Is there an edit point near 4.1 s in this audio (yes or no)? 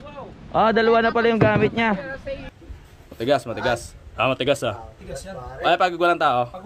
no